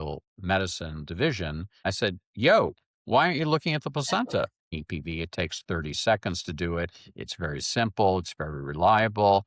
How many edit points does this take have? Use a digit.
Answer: 2